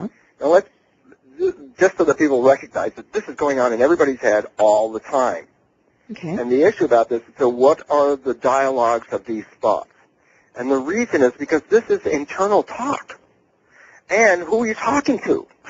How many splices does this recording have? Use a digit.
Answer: 1